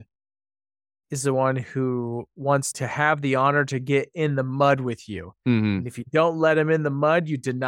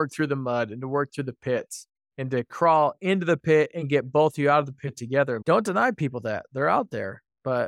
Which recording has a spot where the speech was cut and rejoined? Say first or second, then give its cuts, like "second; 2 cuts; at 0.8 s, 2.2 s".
first; 1 cut; at 2.7 s